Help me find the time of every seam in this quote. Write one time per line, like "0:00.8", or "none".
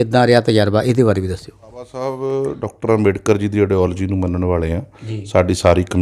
0:02.0